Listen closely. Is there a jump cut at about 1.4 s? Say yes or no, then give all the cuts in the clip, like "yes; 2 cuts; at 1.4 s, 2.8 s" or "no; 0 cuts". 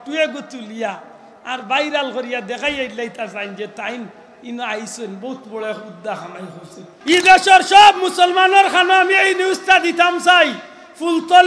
no; 1 cut; at 6.9 s